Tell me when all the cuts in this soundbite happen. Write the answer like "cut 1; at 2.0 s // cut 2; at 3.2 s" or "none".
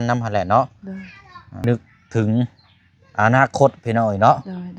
cut 1; at 1.5 s

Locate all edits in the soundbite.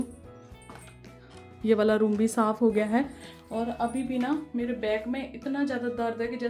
none

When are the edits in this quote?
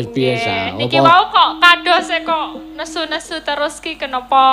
none

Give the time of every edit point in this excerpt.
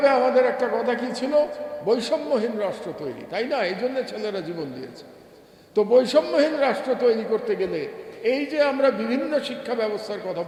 none

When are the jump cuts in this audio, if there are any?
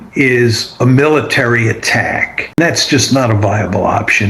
cut 1; at 2.6 s

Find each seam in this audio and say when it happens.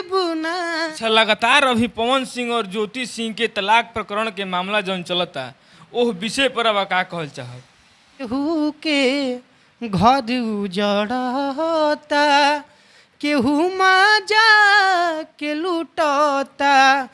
cut 1; at 0.9 s // cut 2; at 8.3 s

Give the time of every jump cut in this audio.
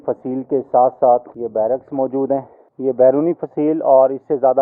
cut 1; at 1.4 s // cut 2; at 2.6 s

